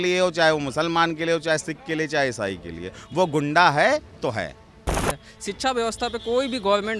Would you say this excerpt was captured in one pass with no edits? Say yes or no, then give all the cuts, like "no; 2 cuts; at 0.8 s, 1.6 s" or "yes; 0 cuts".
no; 1 cut; at 5.2 s